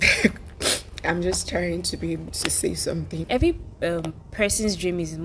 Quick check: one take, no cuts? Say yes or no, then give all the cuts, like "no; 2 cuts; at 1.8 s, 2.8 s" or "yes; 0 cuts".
no; 1 cut; at 3.2 s